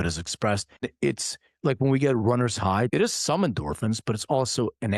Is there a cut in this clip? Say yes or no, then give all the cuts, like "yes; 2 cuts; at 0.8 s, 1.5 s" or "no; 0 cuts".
yes; 2 cuts; at 0.9 s, 2.9 s